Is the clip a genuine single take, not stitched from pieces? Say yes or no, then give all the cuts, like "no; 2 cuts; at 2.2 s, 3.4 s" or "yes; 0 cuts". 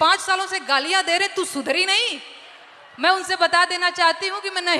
yes; 0 cuts